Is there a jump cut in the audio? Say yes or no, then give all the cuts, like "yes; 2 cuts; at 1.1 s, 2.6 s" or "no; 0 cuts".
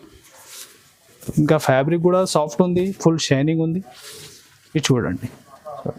no; 0 cuts